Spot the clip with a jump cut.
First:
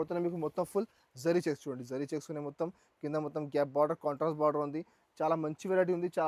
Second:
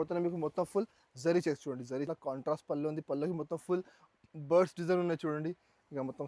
second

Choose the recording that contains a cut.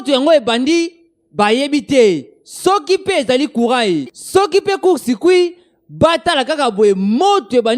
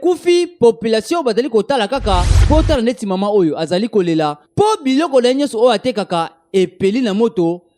second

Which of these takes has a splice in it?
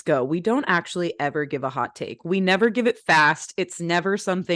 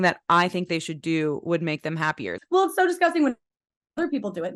second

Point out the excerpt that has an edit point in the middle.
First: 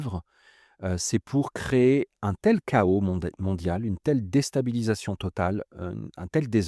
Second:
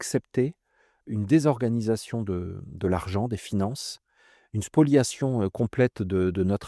second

